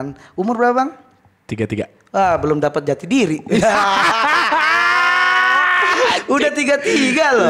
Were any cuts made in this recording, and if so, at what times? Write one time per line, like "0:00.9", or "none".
none